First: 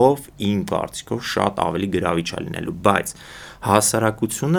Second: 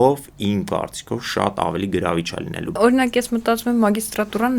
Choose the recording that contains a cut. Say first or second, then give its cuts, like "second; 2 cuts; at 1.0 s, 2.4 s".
second; 1 cut; at 2.7 s